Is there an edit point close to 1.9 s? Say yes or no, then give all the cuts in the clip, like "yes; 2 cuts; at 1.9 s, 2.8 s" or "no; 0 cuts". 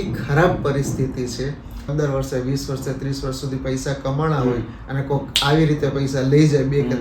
yes; 1 cut; at 1.9 s